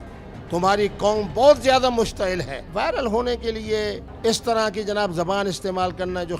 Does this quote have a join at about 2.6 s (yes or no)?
yes